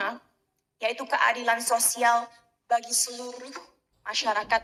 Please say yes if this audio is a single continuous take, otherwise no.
yes